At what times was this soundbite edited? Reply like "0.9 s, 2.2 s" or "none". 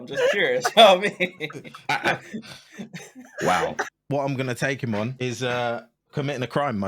4.0 s, 5.1 s